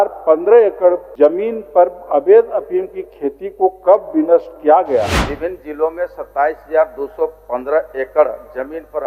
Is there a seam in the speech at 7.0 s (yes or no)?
no